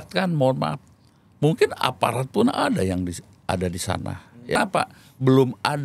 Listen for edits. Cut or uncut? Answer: cut